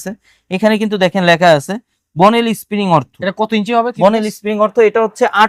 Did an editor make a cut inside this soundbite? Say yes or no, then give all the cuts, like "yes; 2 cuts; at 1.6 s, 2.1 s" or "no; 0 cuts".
no; 0 cuts